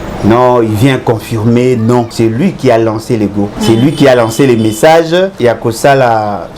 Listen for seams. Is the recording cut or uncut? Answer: cut